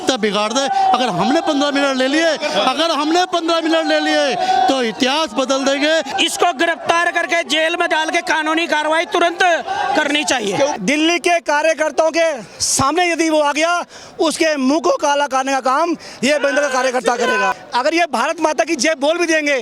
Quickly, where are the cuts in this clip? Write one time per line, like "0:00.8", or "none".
0:06.1
0:10.7
0:17.5